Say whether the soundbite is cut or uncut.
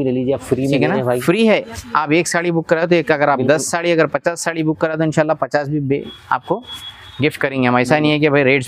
uncut